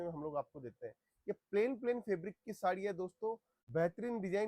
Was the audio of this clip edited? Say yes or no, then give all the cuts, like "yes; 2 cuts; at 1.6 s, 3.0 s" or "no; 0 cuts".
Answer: yes; 1 cut; at 3.5 s